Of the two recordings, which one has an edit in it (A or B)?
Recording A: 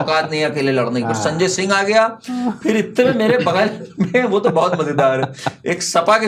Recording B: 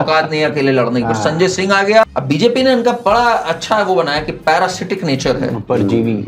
B